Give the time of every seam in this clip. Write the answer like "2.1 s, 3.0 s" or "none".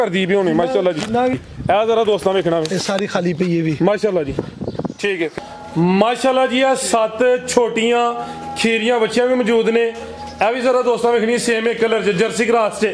1.4 s, 5.3 s